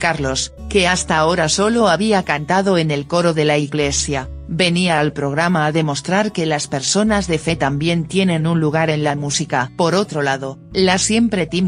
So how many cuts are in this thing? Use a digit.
1